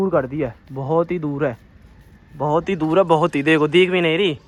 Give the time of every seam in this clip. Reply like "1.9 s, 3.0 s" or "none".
none